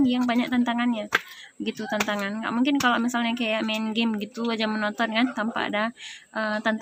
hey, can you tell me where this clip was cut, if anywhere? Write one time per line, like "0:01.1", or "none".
none